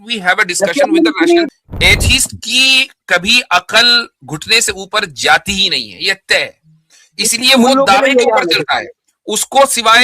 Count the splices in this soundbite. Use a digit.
1